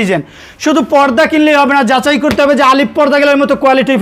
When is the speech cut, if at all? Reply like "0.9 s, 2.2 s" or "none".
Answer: none